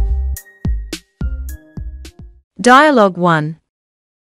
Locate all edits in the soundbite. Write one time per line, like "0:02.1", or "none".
0:02.2